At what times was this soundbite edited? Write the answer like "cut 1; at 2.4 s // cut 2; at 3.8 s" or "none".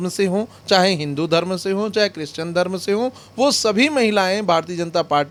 none